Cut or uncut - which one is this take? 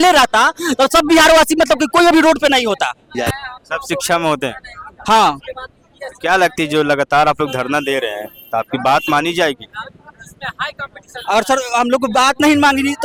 uncut